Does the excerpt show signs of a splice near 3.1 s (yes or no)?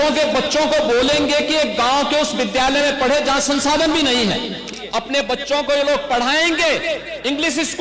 no